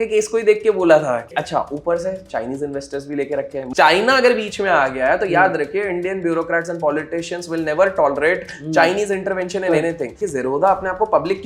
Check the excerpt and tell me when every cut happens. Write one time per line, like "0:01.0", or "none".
0:01.3
0:03.6
0:10.2